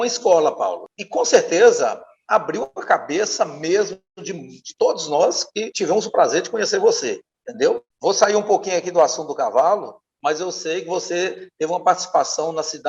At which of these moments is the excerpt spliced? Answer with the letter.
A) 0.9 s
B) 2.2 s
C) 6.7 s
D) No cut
A